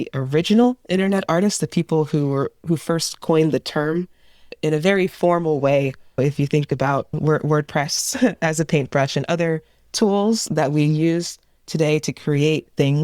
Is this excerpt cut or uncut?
cut